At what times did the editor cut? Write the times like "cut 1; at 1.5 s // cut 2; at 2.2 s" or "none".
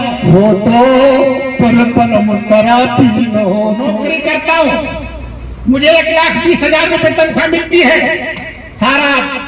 cut 1; at 4.0 s